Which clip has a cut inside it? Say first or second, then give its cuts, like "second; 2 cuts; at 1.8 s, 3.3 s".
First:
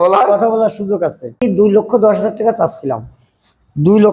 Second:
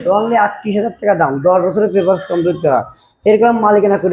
first; 1 cut; at 1.4 s